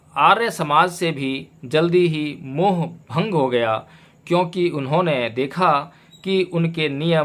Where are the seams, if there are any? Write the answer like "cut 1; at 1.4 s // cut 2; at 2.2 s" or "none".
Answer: none